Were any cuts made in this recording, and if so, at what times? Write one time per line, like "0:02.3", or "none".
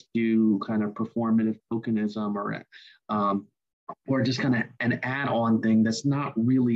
none